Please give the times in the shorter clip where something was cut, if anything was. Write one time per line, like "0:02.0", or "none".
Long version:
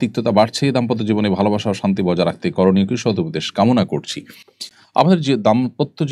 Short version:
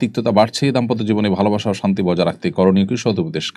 none